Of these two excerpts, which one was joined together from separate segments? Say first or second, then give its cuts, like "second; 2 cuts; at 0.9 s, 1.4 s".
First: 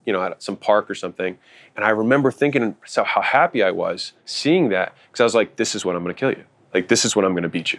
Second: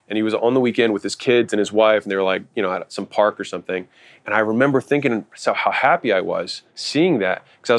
first; 1 cut; at 6.5 s